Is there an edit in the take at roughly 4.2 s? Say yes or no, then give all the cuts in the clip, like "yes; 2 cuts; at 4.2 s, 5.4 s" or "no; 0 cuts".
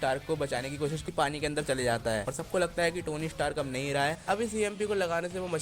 yes; 2 cuts; at 1.0 s, 4.2 s